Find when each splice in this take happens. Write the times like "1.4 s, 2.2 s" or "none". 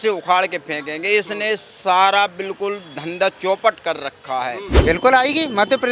4.7 s